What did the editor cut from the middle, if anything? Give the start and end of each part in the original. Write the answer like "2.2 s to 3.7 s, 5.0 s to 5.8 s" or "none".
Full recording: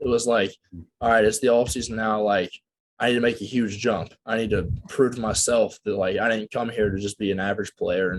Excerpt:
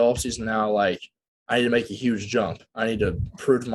none